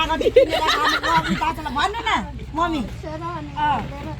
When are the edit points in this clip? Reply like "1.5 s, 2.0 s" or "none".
3.0 s